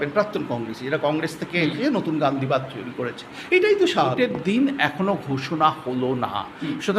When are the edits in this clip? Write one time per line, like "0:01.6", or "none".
0:04.2

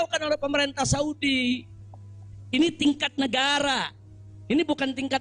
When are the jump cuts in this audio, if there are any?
none

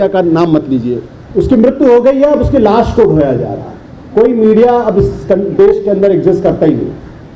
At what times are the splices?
0:01.1

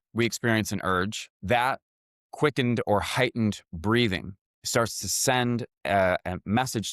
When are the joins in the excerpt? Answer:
0:01.3

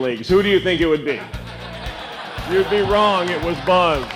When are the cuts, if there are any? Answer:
0:02.4

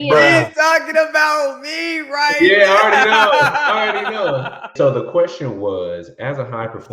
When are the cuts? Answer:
0:04.7

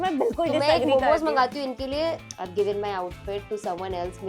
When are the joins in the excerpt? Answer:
0:02.2

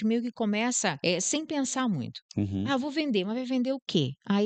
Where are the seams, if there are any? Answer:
0:01.0

